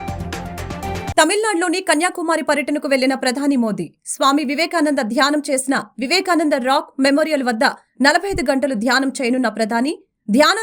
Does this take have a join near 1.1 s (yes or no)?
yes